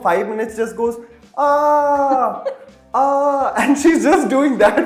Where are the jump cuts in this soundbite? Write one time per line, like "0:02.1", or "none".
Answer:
none